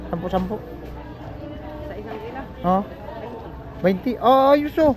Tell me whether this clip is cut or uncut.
uncut